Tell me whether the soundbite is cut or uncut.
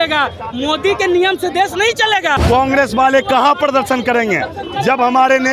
cut